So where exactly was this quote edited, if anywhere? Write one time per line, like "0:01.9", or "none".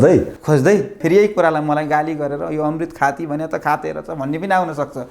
0:01.0